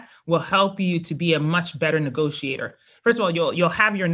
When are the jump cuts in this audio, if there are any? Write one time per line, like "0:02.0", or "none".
0:02.9